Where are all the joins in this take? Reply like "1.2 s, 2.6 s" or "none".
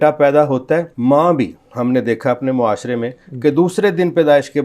0.9 s